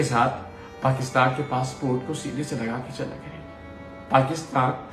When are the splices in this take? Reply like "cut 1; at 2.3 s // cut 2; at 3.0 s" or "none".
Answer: none